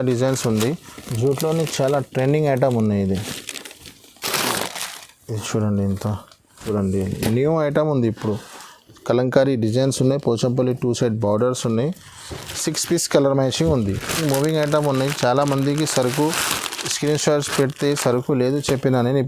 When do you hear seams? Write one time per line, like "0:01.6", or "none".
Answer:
0:06.6
0:14.2